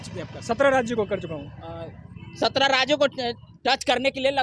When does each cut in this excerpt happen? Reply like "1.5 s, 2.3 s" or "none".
none